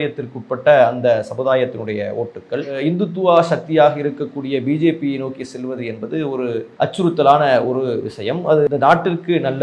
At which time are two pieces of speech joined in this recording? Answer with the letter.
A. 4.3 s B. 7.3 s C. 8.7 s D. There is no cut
C